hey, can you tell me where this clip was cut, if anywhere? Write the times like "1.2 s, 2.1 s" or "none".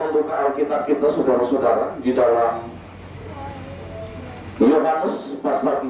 none